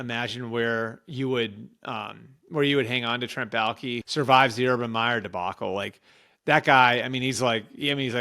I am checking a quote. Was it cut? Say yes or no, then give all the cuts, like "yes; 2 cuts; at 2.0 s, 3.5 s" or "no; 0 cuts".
yes; 1 cut; at 4.0 s